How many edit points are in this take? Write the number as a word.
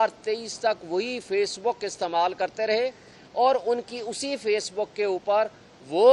zero